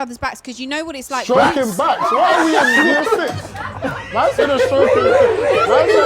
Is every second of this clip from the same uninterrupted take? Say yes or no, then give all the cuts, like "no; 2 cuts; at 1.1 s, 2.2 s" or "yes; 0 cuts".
yes; 0 cuts